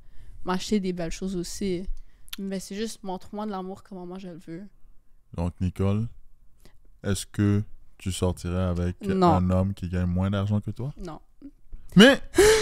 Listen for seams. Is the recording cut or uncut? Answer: uncut